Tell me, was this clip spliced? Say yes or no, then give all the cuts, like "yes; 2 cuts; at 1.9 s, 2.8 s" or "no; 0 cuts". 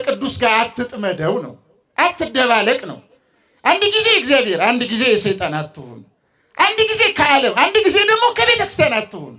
no; 0 cuts